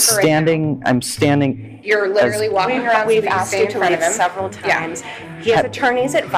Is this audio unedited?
yes; 0 cuts

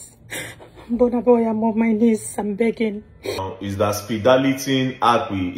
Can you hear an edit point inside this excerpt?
yes; 1 cut; at 3.6 s

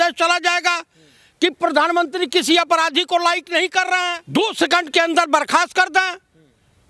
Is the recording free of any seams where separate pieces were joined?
no; 1 cut; at 4.2 s

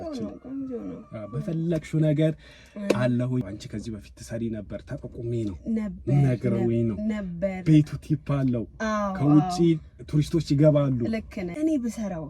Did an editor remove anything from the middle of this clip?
yes; 2 cuts; at 3.4 s, 11.4 s

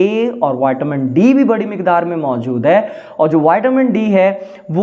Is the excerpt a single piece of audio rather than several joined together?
yes; 0 cuts

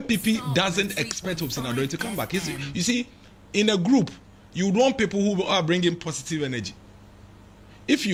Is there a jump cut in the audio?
no; 0 cuts

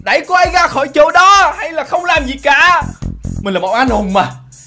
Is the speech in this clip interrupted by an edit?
no; 0 cuts

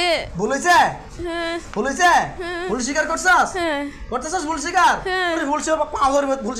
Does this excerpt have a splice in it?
yes; 1 cut; at 5.4 s

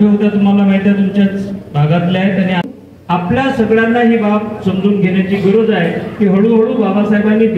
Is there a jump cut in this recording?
yes; 1 cut; at 2.6 s

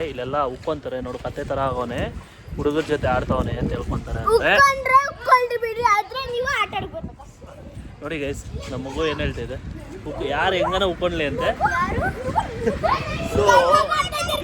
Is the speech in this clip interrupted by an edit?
no; 0 cuts

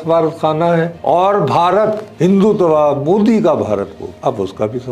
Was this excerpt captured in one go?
no; 3 cuts; at 0.9 s, 2.1 s, 4.0 s

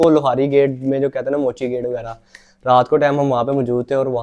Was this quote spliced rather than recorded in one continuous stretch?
no; 0 cuts

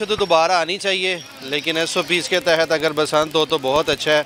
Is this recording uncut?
yes; 0 cuts

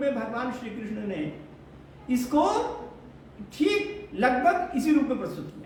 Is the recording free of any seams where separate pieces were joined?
yes; 0 cuts

